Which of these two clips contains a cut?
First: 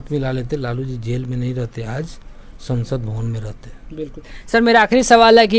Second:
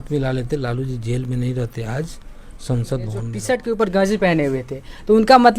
second; 1 cut; at 3.3 s

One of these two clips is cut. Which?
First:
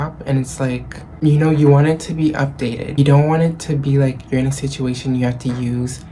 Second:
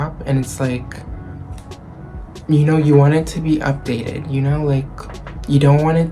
first; 2 cuts; at 1.0 s, 2.9 s

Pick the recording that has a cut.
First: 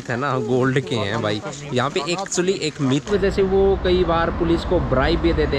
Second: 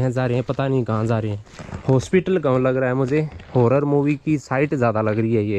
first; 1 cut; at 3.1 s

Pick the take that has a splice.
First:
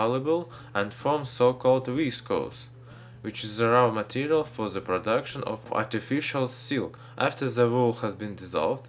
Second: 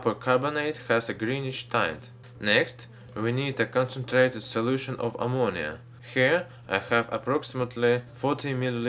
second; 1 cut; at 4.8 s

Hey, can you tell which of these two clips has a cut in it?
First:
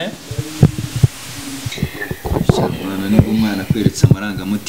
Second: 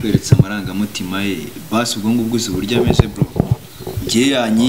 first; 1 cut; at 1.7 s

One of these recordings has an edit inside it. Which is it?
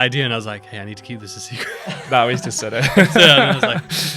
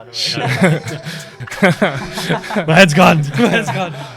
second; 1 cut; at 1.3 s

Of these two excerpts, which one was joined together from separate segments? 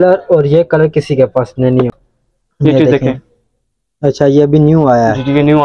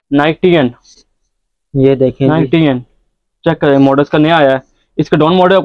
first; 1 cut; at 1.9 s

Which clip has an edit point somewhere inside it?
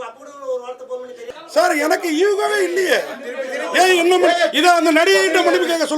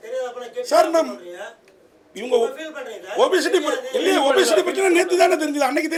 first; 1 cut; at 1.3 s

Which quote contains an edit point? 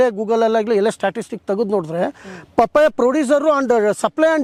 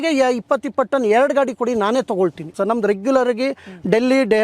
second; 1 cut; at 2.5 s

